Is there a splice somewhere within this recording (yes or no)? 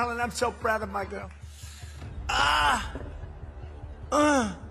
no